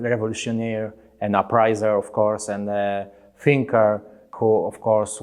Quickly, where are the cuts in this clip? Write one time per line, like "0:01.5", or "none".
0:04.3